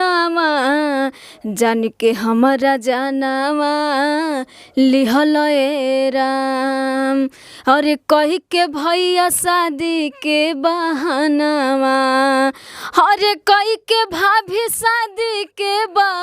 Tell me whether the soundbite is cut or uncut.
uncut